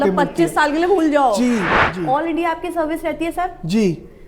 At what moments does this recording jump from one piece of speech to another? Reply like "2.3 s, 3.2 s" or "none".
1.8 s